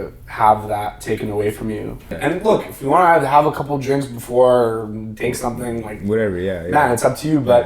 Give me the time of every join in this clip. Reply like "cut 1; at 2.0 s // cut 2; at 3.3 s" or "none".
cut 1; at 2.0 s